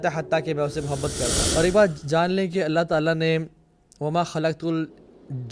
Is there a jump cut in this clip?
yes; 1 cut; at 1.4 s

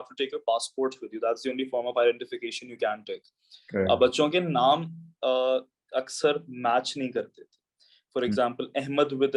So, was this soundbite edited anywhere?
no; 0 cuts

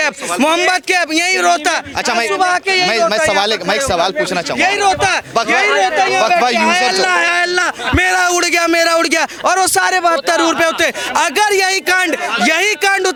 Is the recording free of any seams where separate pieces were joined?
yes; 0 cuts

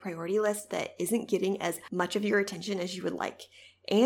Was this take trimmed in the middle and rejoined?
yes; 1 cut; at 1.8 s

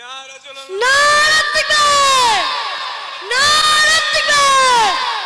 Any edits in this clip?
no; 0 cuts

